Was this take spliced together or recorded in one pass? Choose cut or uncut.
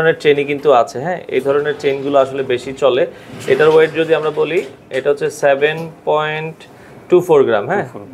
uncut